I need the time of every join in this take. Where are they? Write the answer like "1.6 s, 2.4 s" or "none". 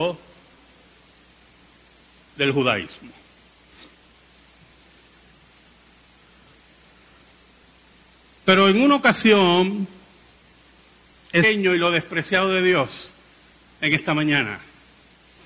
none